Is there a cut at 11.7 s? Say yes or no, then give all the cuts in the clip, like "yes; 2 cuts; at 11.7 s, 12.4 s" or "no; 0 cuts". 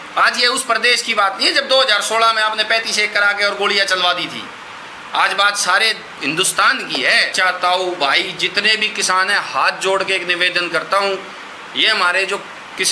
no; 1 cut; at 7.3 s